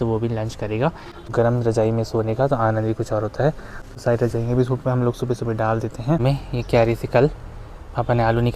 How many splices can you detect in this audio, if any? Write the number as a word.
two